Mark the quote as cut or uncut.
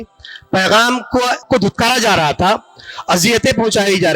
cut